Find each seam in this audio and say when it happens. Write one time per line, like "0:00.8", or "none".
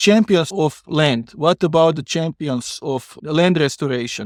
none